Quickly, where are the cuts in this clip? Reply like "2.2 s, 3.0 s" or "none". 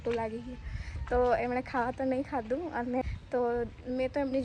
3.0 s